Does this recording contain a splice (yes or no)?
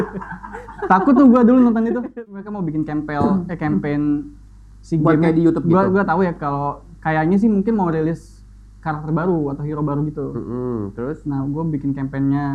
yes